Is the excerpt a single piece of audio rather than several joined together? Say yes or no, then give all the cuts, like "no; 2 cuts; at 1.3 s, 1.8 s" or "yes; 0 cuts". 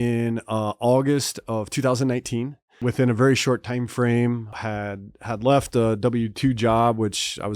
no; 2 cuts; at 2.8 s, 4.6 s